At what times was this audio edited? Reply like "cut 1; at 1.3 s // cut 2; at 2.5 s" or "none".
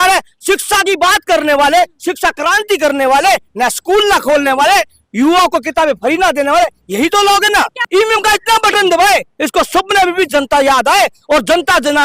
cut 1; at 7.8 s